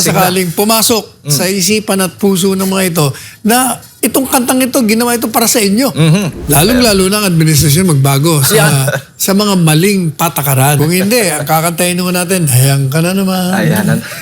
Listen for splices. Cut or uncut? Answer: cut